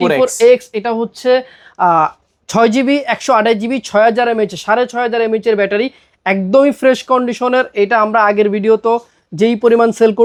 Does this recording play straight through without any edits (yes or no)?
yes